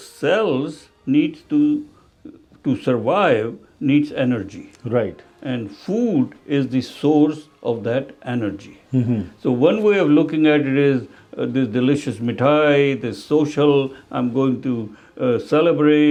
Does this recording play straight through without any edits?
yes; 0 cuts

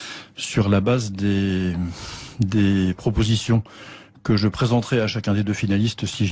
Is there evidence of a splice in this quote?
no; 0 cuts

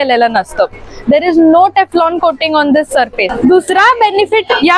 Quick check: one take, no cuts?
no; 1 cut; at 3.3 s

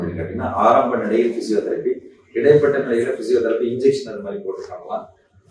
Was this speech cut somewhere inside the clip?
no; 0 cuts

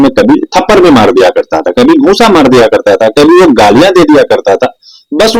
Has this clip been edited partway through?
no; 0 cuts

